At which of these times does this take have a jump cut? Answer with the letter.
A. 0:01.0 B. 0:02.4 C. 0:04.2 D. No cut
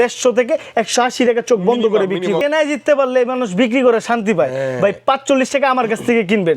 B